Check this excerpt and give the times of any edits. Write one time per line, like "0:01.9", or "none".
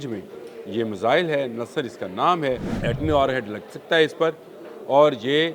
0:02.7